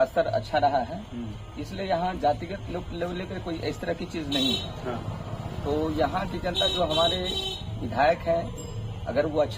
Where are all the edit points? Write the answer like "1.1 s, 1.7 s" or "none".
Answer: none

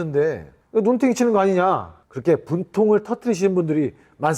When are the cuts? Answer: none

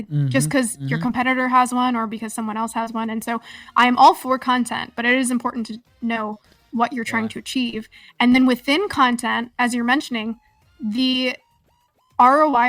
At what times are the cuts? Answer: none

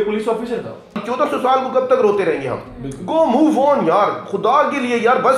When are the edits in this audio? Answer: 1.0 s

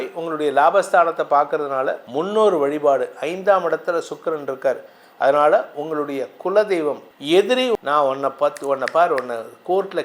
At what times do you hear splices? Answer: 2.0 s, 7.1 s, 7.8 s

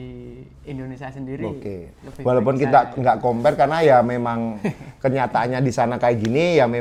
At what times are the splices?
none

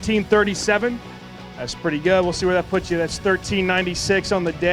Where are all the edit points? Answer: 1.1 s

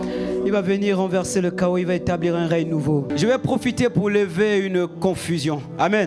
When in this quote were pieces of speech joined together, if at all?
3.1 s

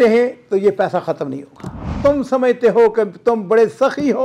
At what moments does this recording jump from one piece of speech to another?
1.9 s

